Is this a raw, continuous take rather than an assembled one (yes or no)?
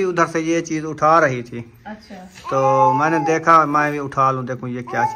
yes